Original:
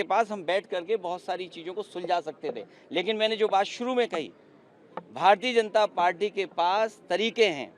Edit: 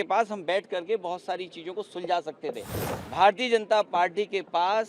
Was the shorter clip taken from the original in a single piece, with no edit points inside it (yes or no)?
no